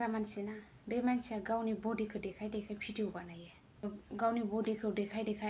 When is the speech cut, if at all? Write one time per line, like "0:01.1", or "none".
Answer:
0:03.8